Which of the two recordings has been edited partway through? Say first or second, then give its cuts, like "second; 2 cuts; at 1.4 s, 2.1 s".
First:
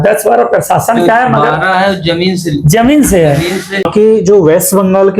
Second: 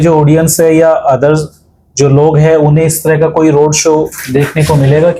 first; 1 cut; at 3.8 s